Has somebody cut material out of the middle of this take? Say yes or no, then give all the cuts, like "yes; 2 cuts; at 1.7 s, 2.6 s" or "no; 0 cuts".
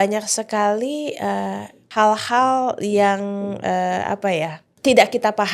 yes; 2 cuts; at 1.8 s, 4.6 s